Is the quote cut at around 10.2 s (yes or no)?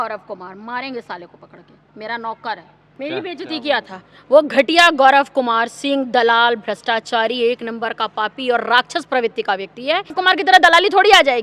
yes